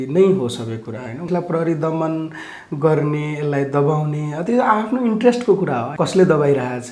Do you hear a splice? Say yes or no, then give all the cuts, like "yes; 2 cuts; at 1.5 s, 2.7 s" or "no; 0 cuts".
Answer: yes; 2 cuts; at 1.3 s, 5.9 s